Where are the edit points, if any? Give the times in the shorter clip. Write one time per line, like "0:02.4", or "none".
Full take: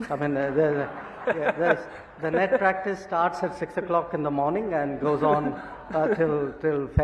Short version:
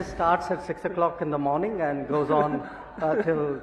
none